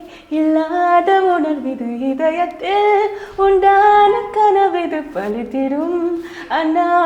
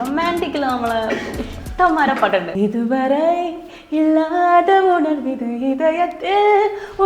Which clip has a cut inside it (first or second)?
second